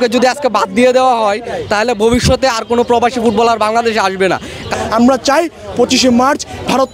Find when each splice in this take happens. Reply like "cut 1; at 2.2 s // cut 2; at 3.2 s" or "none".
cut 1; at 4.8 s